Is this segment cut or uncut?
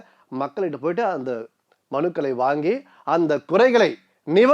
uncut